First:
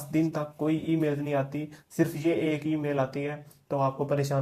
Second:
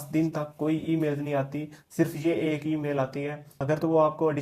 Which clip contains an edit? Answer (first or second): second